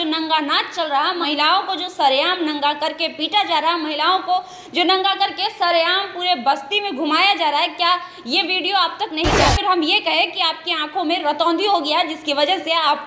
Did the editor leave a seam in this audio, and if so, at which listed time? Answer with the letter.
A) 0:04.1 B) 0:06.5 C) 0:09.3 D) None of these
C